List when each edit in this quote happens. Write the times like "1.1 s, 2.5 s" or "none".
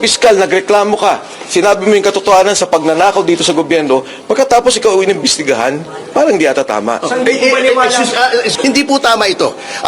8.5 s